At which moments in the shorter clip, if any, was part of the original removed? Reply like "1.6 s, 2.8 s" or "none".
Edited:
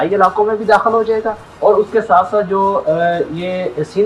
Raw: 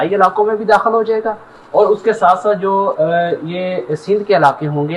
1.4 s